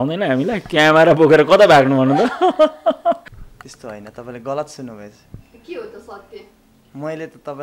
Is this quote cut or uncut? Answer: cut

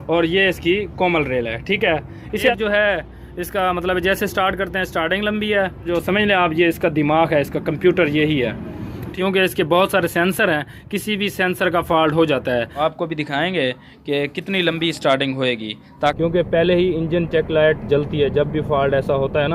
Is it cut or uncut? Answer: cut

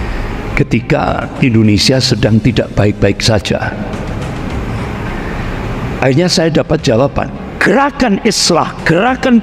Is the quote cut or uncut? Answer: cut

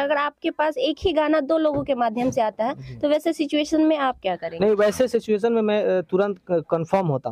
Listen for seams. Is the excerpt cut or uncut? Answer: uncut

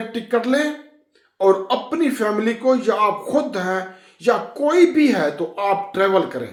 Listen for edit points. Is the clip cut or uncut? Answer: uncut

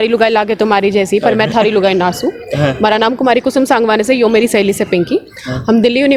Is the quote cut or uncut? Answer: uncut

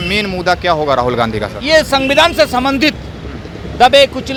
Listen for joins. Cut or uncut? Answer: uncut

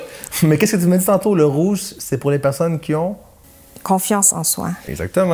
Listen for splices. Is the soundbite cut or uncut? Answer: uncut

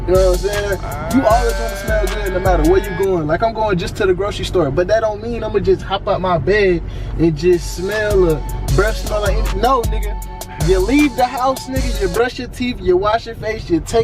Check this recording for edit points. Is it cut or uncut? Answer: uncut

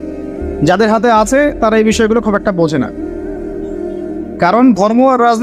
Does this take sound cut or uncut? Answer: cut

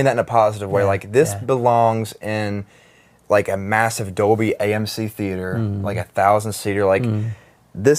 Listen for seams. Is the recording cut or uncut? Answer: uncut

